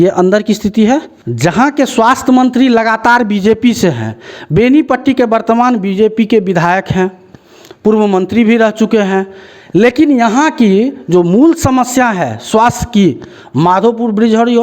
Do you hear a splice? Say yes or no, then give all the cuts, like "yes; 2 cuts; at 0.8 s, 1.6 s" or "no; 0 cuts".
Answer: yes; 1 cut; at 1.2 s